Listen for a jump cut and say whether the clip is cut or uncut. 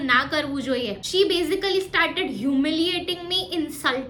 uncut